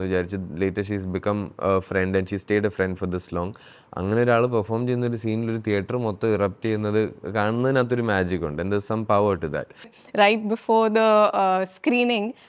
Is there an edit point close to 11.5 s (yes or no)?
no